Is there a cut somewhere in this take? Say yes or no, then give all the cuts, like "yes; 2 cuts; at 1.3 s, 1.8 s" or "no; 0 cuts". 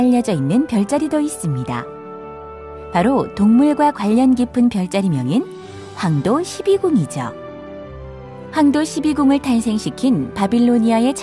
no; 0 cuts